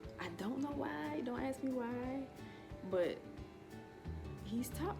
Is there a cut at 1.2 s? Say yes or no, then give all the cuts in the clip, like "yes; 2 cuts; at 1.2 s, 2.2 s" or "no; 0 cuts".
no; 0 cuts